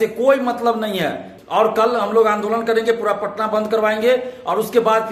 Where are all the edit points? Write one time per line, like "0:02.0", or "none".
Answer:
0:01.3